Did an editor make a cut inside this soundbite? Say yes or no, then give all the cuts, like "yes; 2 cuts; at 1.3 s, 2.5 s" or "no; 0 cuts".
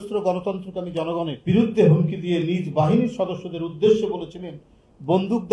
yes; 1 cut; at 1.4 s